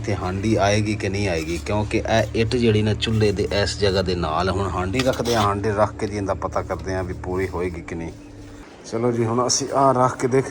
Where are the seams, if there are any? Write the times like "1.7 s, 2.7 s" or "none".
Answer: none